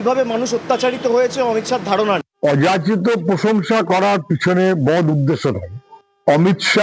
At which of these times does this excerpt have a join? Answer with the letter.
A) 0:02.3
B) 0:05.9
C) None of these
A